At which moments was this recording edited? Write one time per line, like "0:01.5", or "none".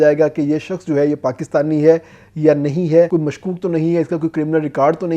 0:03.1